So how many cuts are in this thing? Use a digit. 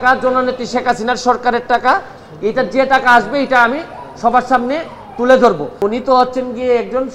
1